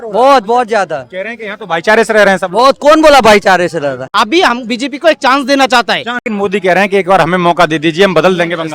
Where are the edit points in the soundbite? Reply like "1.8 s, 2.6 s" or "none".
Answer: 4.0 s, 6.2 s